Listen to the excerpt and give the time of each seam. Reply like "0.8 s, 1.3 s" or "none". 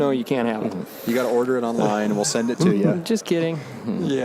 none